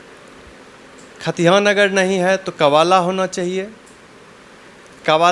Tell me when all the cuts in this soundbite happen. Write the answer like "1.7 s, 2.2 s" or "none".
none